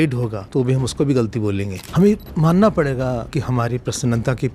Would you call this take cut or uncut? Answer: cut